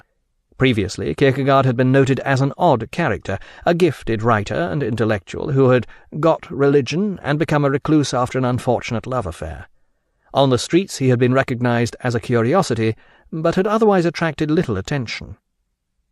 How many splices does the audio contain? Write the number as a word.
one